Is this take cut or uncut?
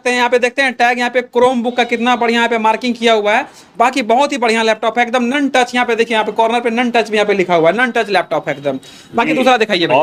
uncut